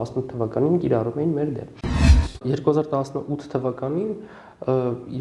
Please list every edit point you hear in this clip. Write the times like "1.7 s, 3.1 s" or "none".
2.2 s